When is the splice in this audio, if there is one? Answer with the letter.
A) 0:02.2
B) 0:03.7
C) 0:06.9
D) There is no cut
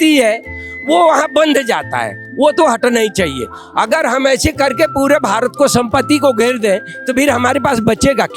A